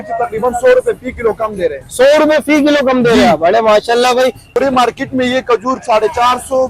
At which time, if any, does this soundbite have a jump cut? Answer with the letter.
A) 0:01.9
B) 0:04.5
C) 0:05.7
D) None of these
B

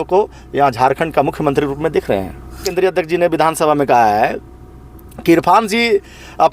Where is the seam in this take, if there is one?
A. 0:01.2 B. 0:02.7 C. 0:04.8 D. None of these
B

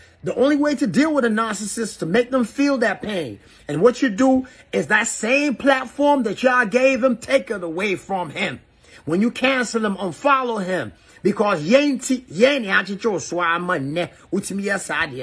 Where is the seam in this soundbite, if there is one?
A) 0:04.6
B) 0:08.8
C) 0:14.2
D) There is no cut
D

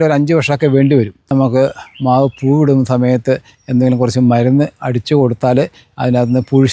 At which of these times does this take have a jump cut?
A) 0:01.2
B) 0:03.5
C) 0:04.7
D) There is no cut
A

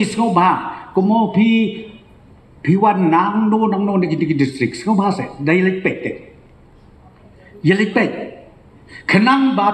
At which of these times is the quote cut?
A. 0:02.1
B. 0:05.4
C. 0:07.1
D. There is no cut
D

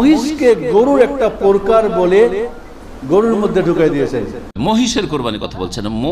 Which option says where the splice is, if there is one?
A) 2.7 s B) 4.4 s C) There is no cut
B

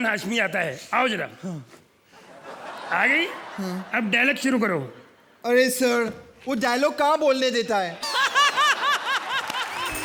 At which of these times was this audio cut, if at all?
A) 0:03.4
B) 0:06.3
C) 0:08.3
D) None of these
D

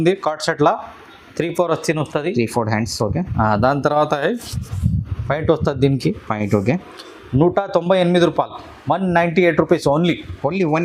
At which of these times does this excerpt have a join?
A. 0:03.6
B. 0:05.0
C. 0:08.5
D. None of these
D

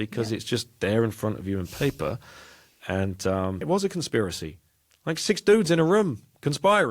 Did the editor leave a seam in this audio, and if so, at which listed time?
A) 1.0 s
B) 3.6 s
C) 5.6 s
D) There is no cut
B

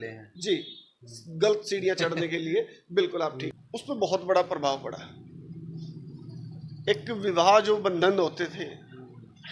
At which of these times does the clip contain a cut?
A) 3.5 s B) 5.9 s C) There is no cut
A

